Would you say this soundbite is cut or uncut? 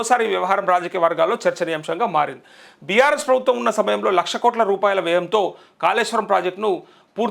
uncut